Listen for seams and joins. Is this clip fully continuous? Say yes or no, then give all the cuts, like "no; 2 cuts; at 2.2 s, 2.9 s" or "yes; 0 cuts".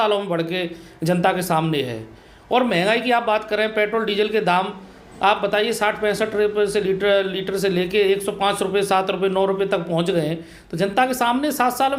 yes; 0 cuts